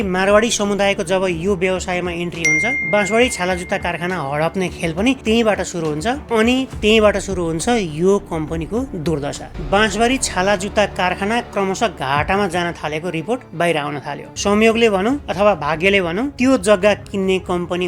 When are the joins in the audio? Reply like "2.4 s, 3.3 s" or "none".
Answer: 9.5 s, 14.3 s